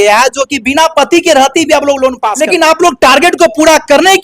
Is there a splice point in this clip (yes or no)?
yes